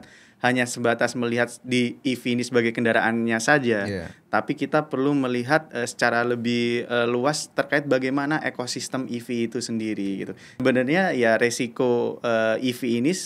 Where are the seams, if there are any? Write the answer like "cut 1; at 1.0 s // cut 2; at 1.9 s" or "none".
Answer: cut 1; at 10.4 s

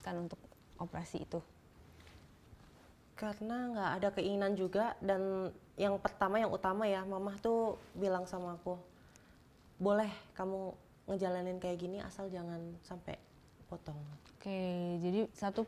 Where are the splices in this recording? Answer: none

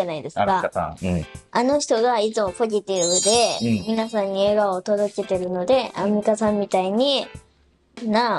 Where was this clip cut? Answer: none

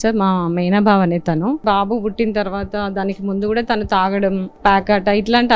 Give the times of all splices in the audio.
cut 1; at 1.6 s // cut 2; at 4.5 s

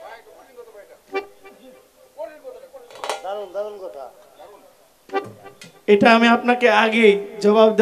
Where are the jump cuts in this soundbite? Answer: none

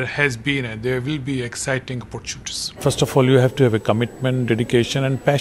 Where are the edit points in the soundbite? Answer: cut 1; at 2.8 s

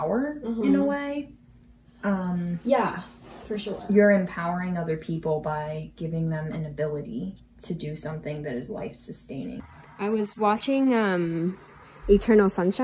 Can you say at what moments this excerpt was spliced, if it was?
cut 1; at 9.7 s

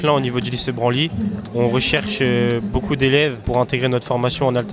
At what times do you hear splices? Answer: cut 1; at 3.4 s

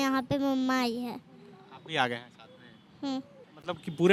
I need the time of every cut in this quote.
none

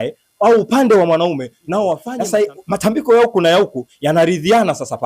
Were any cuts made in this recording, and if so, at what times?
cut 1; at 2.1 s

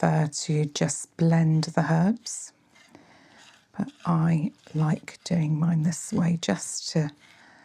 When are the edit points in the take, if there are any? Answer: none

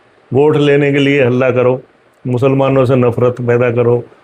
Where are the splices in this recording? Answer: none

